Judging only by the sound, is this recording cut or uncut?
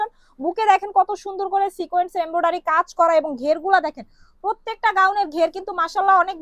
uncut